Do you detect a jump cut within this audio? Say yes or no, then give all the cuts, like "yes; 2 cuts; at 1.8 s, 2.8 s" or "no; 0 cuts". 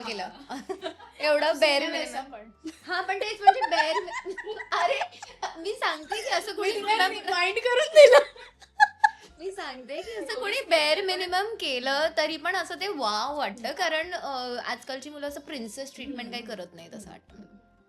no; 0 cuts